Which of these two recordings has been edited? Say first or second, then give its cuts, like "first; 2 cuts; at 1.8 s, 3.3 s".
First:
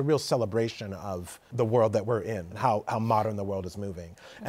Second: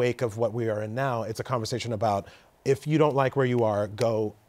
first; 2 cuts; at 1.5 s, 2.5 s